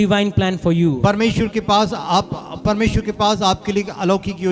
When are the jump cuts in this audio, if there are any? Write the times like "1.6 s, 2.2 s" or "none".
none